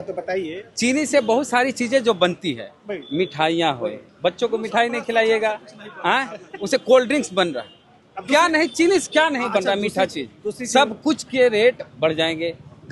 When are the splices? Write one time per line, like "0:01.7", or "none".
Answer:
none